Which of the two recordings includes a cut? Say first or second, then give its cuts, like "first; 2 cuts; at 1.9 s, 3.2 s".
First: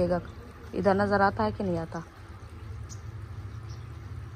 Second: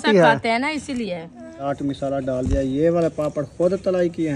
second; 1 cut; at 1.6 s